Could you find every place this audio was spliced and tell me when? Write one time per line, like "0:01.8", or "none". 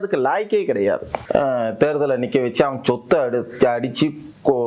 0:01.1